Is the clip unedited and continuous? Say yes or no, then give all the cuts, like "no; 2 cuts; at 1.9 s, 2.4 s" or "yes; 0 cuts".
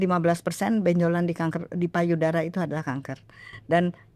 yes; 0 cuts